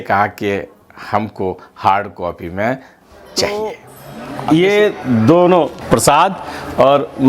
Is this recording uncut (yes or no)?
no